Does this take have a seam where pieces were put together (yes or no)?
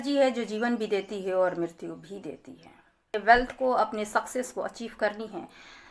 yes